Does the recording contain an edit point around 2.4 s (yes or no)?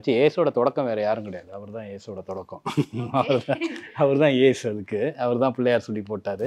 no